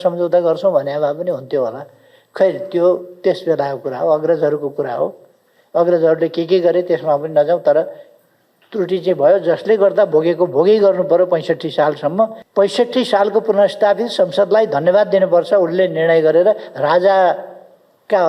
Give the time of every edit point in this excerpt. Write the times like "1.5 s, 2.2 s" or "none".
12.4 s